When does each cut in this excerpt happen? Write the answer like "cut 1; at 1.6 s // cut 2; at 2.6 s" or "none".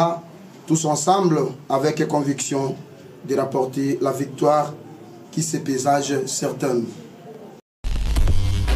cut 1; at 7.7 s